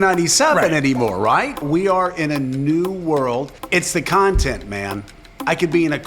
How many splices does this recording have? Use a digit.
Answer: 2